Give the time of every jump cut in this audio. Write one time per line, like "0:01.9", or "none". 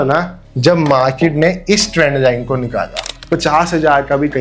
0:03.1